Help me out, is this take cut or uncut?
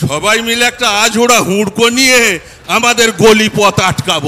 uncut